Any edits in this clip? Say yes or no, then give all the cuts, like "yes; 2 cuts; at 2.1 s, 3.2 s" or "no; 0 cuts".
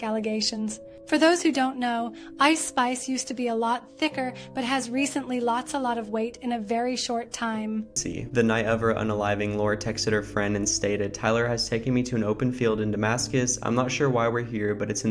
yes; 1 cut; at 8.0 s